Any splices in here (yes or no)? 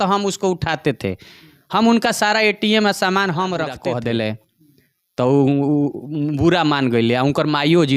yes